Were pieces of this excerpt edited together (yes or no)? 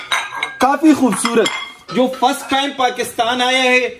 no